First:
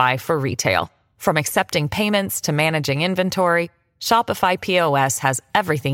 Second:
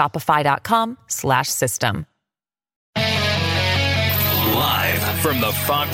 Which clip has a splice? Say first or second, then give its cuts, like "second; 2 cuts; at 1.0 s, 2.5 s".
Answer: second; 2 cuts; at 2.7 s, 4.4 s